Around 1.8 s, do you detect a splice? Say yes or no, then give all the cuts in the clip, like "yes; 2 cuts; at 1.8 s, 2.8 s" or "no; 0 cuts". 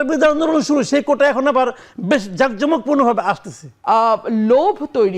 no; 1 cut; at 3.7 s